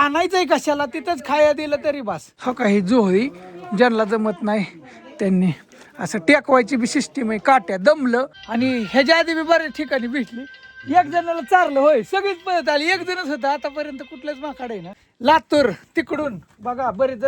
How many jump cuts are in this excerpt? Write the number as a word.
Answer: three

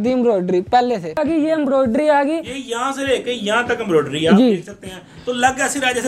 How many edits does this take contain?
one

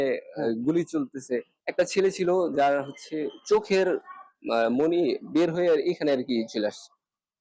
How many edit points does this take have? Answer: one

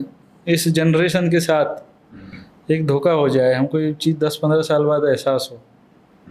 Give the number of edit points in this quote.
zero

